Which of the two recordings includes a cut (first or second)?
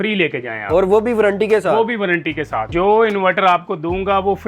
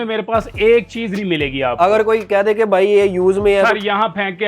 first